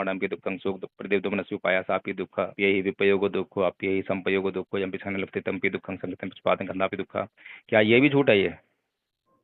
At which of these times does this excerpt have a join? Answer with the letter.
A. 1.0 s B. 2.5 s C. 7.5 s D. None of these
B